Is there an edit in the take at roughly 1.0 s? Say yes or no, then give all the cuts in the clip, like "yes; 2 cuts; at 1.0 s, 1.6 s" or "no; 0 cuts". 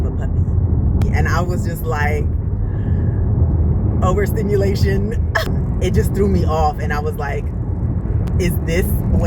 yes; 1 cut; at 1.0 s